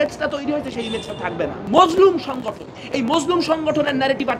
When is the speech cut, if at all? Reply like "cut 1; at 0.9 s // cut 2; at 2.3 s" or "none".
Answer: cut 1; at 1.6 s